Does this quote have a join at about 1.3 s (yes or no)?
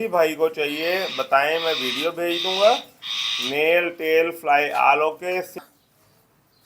no